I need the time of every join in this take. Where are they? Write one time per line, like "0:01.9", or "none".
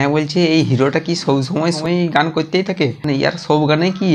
0:01.8